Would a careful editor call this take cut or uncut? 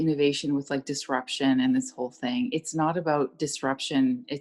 uncut